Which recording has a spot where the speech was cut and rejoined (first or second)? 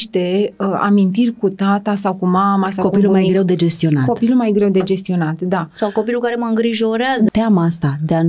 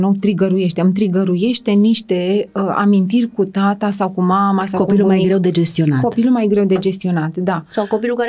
first